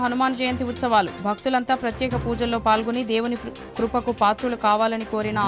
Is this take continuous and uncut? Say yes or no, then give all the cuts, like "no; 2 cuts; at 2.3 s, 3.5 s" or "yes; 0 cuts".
yes; 0 cuts